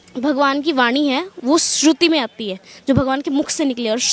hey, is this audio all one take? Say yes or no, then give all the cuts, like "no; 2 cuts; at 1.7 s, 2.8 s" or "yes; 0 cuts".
yes; 0 cuts